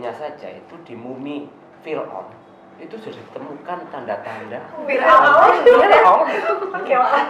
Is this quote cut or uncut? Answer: uncut